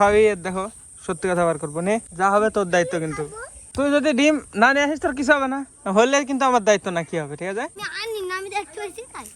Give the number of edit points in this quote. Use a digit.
0